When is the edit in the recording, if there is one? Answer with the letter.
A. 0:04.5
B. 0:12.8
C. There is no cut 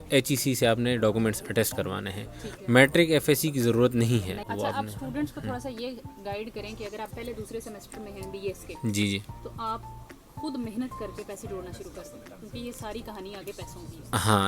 A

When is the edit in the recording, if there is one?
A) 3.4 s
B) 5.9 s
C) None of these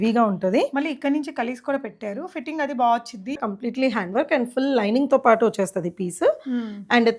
A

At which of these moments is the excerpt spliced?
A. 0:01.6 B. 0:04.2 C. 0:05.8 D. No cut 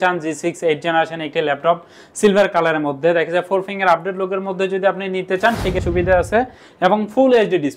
C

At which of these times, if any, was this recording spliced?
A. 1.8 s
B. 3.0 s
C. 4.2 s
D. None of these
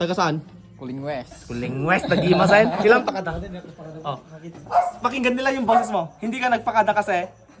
B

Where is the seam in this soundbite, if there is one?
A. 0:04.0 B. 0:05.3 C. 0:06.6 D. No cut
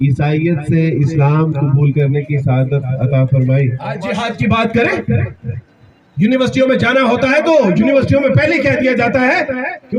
A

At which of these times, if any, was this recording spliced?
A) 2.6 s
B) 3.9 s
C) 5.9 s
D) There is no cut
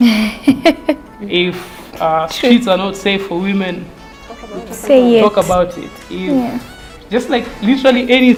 D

